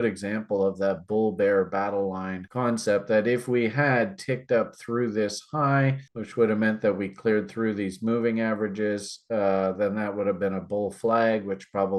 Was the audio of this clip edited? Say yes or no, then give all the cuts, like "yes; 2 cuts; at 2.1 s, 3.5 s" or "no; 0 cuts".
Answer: no; 0 cuts